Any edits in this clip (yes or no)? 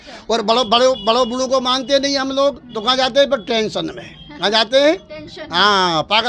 no